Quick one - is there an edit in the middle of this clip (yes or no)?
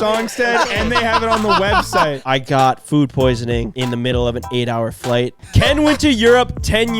yes